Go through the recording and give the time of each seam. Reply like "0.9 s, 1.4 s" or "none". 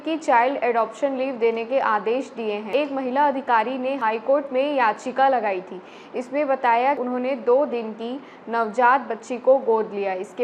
2.7 s, 7.0 s

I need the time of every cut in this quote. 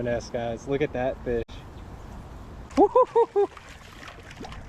2.6 s

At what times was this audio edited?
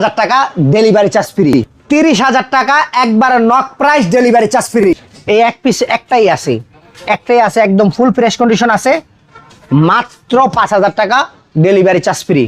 1.6 s, 4.8 s

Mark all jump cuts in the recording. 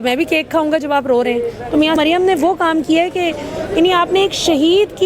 2.0 s

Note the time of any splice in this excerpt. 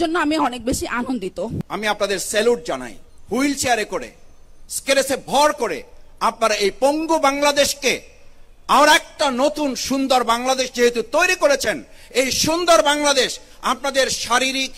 1.6 s

